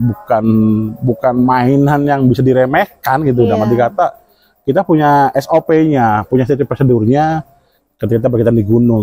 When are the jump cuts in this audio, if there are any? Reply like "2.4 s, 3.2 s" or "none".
none

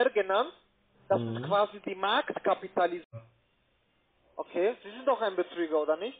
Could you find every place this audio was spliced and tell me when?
3.1 s

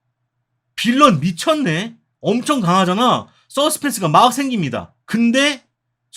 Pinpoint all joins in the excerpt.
4.9 s

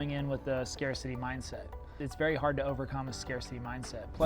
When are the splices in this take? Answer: 1.9 s

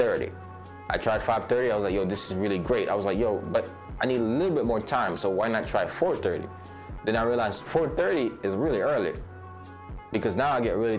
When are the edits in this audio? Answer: none

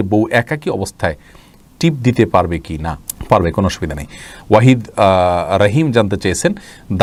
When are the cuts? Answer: none

